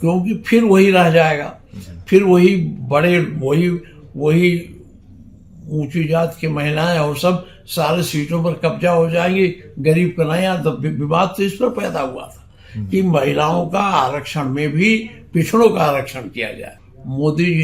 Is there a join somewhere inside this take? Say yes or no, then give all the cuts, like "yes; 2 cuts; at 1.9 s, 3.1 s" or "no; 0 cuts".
yes; 1 cut; at 16.7 s